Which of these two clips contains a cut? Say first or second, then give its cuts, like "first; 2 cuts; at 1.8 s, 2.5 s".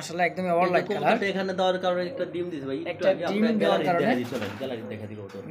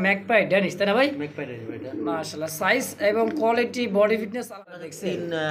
second; 1 cut; at 4.5 s